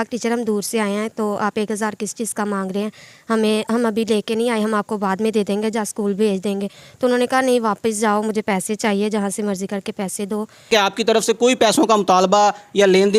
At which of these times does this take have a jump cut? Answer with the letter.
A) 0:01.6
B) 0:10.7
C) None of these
B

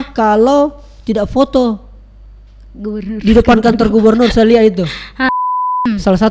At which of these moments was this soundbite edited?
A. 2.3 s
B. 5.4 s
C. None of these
B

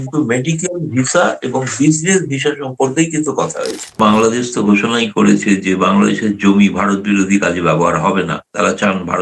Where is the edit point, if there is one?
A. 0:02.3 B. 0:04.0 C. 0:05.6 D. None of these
B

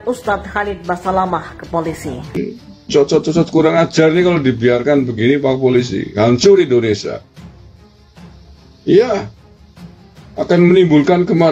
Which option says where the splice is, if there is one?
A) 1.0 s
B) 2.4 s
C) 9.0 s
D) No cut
B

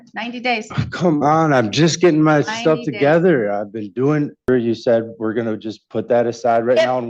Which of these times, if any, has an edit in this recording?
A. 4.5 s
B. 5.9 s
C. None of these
A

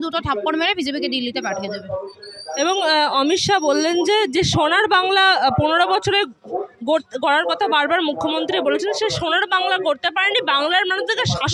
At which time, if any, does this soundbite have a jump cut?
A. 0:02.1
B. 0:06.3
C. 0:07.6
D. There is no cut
D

